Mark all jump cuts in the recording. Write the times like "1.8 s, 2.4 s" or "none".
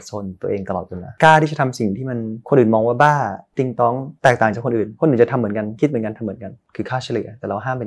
1.1 s, 6.6 s